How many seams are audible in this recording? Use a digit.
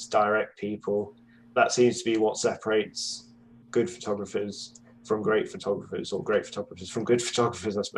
1